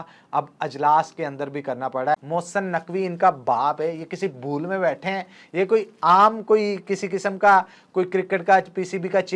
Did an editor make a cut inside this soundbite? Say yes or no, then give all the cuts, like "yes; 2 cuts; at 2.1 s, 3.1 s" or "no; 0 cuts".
yes; 2 cuts; at 2.2 s, 6.0 s